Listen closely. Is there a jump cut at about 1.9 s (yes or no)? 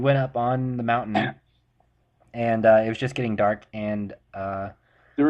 no